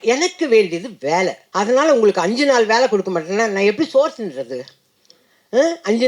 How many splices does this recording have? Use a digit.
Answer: 1